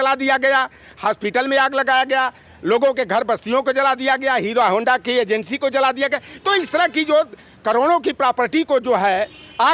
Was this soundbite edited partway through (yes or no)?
no